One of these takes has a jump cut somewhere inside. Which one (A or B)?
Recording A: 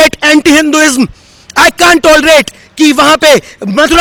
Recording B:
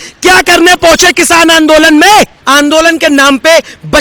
B